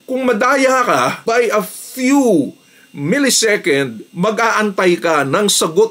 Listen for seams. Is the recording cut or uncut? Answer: uncut